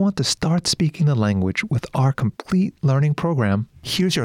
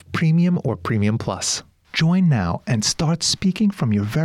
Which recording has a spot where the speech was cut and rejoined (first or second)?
second